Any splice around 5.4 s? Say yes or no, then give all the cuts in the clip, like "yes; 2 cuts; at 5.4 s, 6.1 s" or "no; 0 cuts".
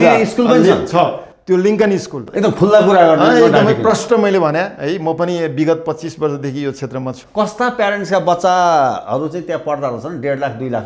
no; 2 cuts; at 2.1 s, 7.2 s